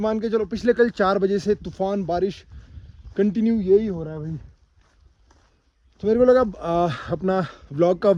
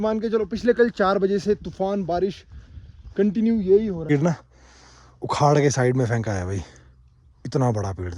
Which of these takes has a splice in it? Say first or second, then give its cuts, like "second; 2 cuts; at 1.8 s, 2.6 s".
second; 1 cut; at 4.1 s